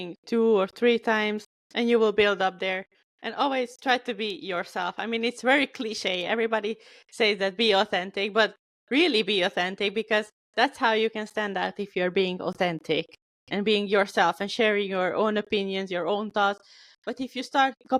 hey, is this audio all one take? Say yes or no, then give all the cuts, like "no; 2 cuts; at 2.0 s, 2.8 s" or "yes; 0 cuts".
yes; 0 cuts